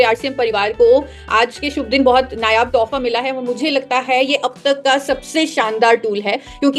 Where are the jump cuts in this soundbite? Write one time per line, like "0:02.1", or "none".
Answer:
none